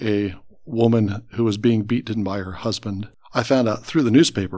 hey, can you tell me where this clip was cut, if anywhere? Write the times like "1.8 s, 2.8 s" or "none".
3.0 s